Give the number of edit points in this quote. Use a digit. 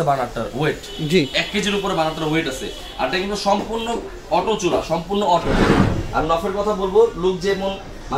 1